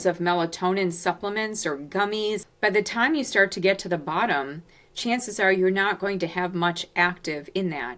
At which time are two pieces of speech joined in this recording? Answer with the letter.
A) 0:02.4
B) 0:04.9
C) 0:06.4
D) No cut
A